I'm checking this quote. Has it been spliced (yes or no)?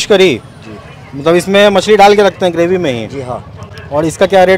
no